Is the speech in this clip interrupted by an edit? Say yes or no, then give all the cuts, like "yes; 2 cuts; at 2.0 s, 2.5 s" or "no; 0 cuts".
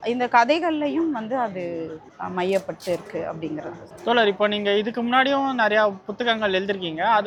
no; 0 cuts